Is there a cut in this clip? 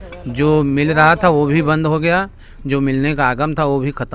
no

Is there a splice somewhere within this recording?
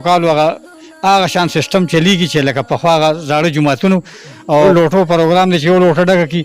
yes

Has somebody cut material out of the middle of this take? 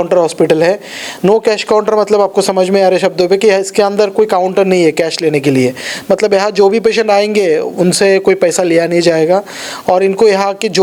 no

